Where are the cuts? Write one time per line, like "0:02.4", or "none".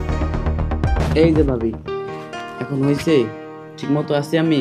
0:01.0